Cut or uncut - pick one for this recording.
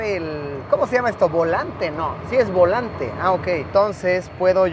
cut